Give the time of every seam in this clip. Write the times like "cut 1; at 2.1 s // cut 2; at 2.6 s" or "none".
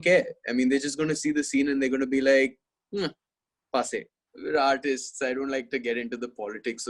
cut 1; at 4.2 s